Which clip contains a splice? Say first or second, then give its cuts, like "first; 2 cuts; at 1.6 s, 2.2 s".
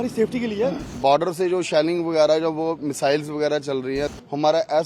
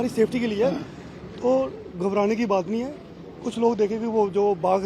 first; 2 cuts; at 1.0 s, 4.1 s